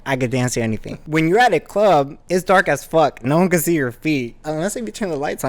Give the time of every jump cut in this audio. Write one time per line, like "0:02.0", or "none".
0:01.0
0:04.4